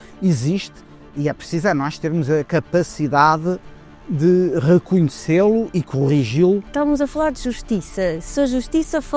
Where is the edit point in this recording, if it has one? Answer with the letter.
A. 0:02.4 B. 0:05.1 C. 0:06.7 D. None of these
C